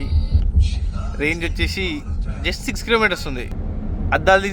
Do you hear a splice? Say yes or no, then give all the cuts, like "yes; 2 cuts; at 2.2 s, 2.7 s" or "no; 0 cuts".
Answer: yes; 1 cut; at 3.6 s